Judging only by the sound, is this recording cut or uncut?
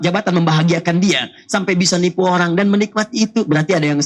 uncut